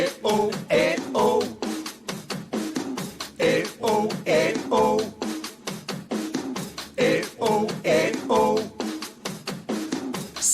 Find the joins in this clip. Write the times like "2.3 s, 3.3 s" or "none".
1.5 s